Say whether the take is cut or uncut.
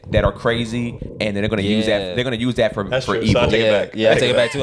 uncut